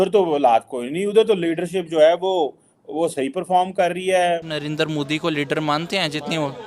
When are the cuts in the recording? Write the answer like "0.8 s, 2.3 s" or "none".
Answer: 4.5 s